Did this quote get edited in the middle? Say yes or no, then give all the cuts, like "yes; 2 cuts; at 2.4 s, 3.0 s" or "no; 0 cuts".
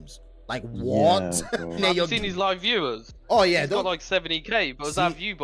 yes; 1 cut; at 1.8 s